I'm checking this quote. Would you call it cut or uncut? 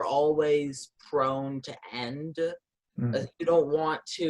cut